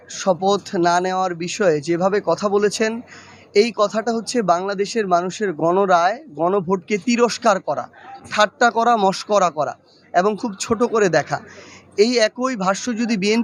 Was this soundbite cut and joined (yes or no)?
no